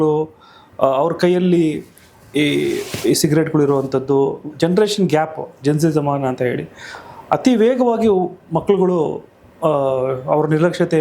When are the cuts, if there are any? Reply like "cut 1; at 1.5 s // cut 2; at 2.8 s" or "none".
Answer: none